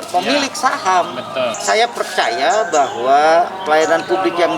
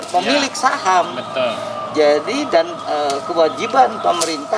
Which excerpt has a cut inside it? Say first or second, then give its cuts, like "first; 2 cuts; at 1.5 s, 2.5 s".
first; 1 cut; at 1.6 s